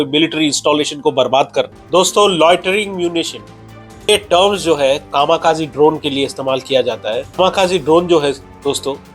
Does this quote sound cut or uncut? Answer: cut